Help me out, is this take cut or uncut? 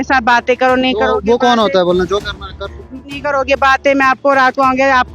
cut